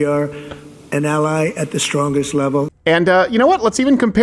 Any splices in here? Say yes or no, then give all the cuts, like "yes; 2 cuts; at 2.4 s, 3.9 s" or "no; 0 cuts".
yes; 1 cut; at 2.7 s